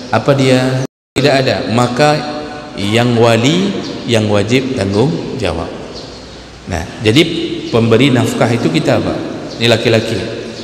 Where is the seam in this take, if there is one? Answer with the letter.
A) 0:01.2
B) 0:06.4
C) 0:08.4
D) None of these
A